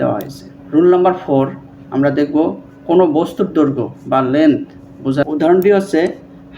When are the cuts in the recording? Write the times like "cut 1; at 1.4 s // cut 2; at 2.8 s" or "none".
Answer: cut 1; at 5.3 s